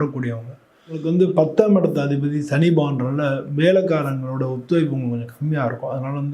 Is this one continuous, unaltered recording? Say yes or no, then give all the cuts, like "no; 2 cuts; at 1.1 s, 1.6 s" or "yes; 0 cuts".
no; 1 cut; at 1.0 s